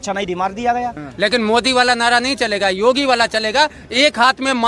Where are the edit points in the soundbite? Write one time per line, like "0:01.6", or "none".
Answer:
0:01.0